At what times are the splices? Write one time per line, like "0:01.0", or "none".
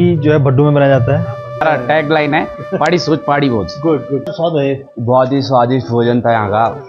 0:01.6
0:04.3